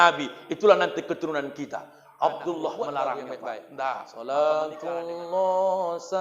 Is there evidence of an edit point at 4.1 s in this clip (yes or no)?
yes